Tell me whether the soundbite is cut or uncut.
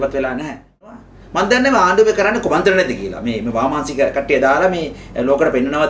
cut